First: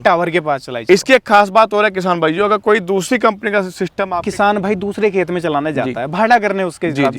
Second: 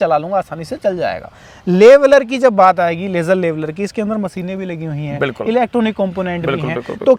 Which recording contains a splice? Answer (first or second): first